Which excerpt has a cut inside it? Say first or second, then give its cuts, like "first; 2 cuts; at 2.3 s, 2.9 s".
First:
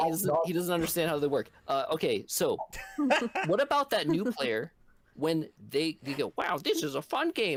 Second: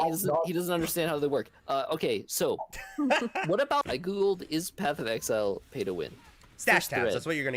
second; 1 cut; at 3.9 s